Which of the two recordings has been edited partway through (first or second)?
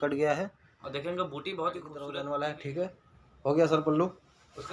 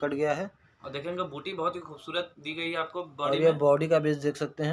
first